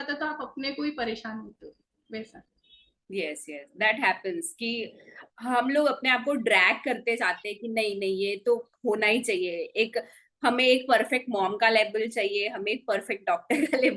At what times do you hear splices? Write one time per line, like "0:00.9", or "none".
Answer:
none